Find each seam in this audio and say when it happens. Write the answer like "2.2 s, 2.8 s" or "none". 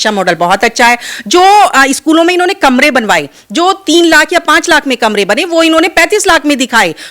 none